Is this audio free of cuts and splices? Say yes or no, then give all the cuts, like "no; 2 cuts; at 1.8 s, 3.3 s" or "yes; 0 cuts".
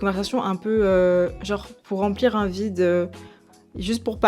yes; 0 cuts